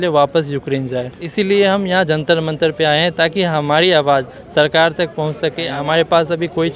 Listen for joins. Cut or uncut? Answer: cut